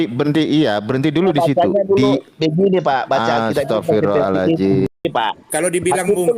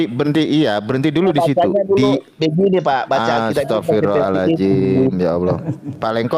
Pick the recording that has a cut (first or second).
first